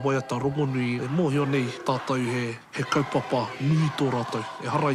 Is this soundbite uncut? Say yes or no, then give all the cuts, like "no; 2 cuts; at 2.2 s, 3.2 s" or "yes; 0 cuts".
no; 3 cuts; at 1.0 s, 1.8 s, 2.7 s